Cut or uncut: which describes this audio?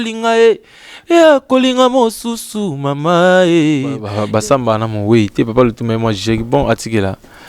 cut